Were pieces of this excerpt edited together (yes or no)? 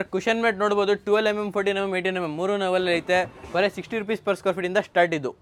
no